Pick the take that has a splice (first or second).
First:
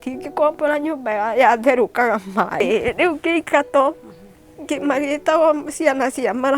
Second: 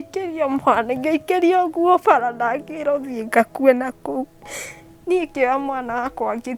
first